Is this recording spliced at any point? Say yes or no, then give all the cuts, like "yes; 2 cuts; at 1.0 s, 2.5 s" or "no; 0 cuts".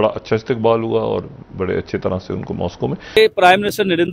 yes; 1 cut; at 3.2 s